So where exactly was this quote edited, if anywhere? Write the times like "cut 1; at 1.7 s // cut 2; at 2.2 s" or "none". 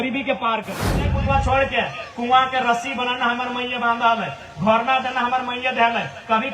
cut 1; at 1.2 s